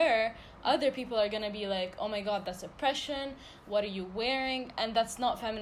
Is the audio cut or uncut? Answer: uncut